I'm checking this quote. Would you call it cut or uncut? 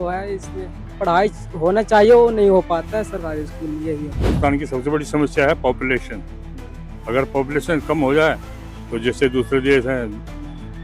cut